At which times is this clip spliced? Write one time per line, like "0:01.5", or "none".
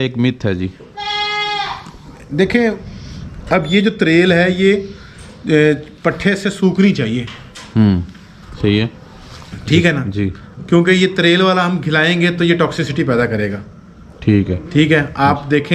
0:02.9